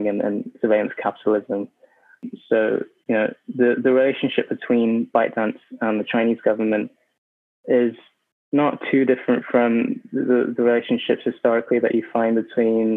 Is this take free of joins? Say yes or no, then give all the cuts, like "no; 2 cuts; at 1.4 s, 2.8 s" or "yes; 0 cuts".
no; 1 cut; at 2.3 s